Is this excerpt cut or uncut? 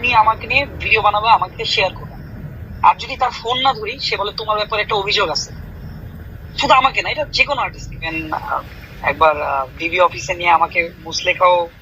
cut